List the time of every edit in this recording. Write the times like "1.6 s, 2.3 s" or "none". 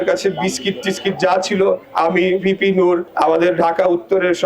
1.9 s, 3.1 s